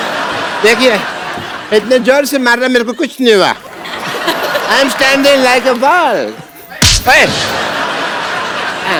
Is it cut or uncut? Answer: uncut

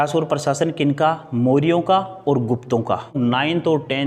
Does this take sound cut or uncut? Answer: cut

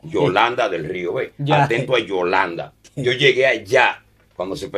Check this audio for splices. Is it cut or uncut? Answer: cut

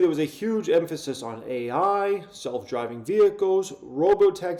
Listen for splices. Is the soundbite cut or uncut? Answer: uncut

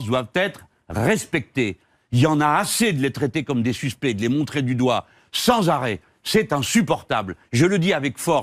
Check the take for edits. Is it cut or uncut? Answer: uncut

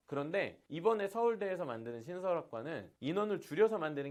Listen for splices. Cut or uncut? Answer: uncut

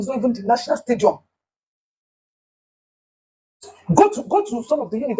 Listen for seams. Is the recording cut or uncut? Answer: uncut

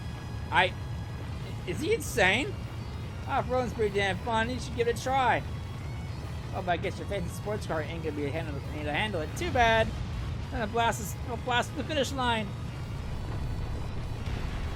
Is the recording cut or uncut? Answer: uncut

